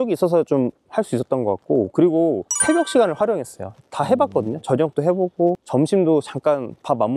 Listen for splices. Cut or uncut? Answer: uncut